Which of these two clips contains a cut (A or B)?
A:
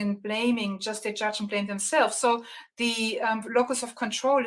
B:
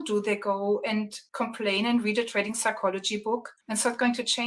B